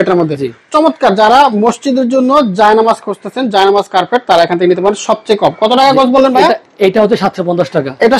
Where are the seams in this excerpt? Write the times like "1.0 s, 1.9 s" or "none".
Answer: none